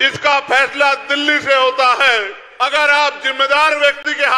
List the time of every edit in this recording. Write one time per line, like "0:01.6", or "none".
0:02.4